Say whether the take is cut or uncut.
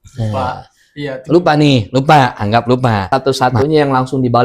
cut